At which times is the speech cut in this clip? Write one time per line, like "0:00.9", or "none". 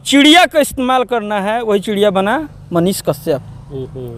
none